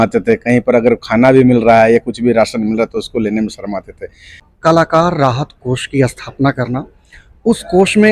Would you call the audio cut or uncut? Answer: cut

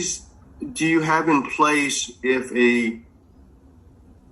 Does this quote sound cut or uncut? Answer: uncut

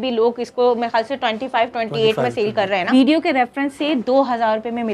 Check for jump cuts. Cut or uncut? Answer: cut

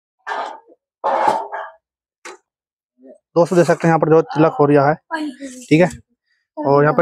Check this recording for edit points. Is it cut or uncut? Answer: uncut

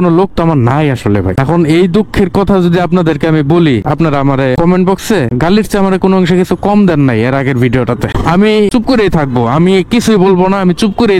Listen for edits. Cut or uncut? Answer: uncut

